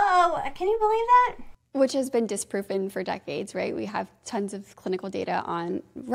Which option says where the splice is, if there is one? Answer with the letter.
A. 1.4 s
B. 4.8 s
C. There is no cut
C